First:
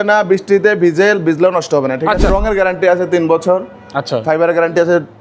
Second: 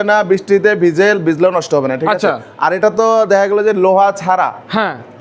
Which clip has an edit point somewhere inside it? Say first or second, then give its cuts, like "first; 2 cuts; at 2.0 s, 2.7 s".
first; 1 cut; at 2.3 s